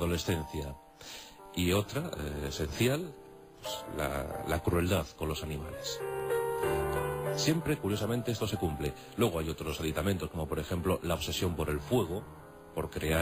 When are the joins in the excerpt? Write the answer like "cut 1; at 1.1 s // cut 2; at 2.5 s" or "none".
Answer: none

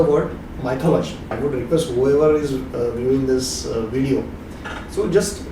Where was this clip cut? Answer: cut 1; at 1.3 s

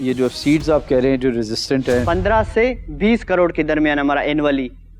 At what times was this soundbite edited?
cut 1; at 2.0 s

